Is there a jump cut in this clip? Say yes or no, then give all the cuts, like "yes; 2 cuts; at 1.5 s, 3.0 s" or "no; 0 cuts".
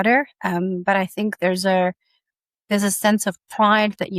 no; 0 cuts